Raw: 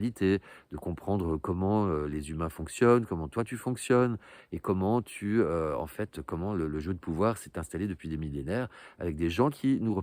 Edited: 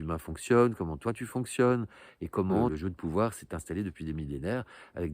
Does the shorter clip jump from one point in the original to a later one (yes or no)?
yes